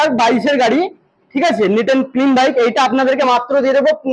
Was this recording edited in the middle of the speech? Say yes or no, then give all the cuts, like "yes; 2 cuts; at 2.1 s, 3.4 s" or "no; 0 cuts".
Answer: no; 0 cuts